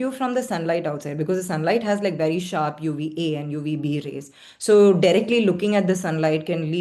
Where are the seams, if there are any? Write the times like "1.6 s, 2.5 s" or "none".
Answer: none